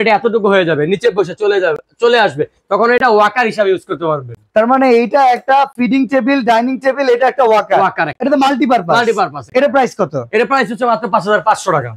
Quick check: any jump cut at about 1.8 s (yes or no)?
no